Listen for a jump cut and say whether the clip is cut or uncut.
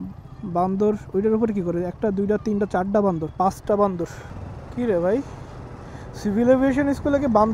cut